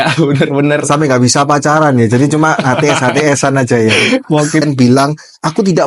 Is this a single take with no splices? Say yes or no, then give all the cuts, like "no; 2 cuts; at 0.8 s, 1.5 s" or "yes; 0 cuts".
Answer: no; 1 cut; at 4.6 s